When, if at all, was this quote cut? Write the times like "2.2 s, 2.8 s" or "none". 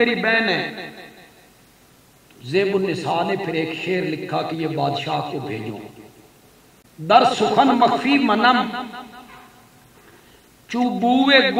6.8 s